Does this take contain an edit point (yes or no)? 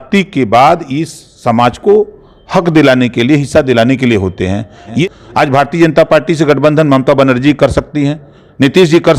yes